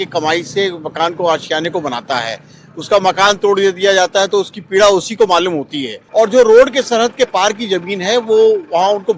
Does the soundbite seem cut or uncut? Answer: cut